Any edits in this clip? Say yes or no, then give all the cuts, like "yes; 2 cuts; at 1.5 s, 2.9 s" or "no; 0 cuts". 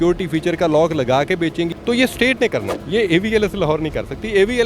yes; 2 cuts; at 1.7 s, 2.8 s